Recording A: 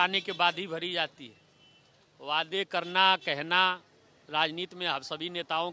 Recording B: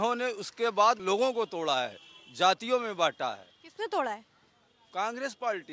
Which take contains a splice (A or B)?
B